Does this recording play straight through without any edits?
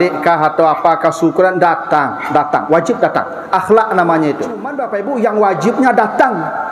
no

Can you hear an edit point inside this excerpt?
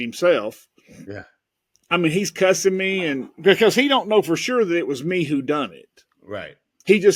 no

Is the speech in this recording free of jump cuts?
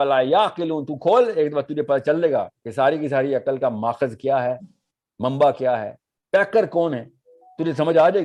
yes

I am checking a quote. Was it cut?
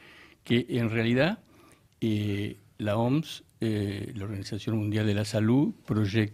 no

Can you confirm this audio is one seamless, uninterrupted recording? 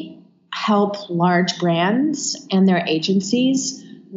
yes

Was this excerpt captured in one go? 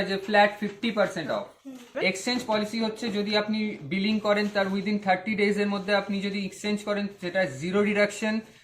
no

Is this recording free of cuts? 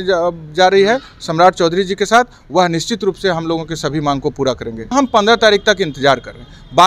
no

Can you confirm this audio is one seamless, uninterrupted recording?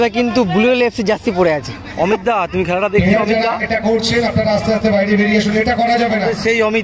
yes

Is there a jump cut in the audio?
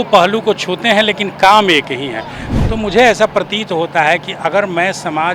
yes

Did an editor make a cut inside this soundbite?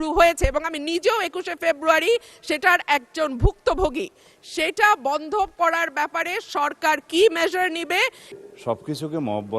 yes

